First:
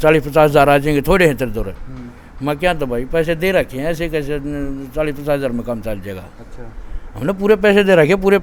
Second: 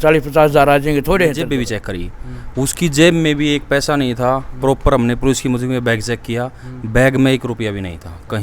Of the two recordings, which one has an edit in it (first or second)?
second